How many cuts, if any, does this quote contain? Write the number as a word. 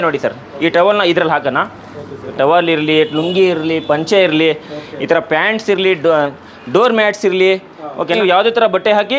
two